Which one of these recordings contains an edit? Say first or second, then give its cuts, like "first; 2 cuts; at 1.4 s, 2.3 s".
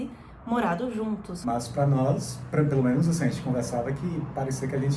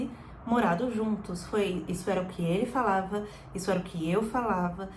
first; 1 cut; at 1.3 s